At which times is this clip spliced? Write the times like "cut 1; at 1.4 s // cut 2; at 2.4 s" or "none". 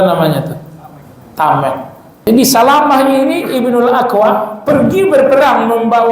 cut 1; at 2.3 s

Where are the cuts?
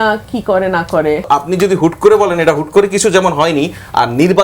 cut 1; at 1.3 s

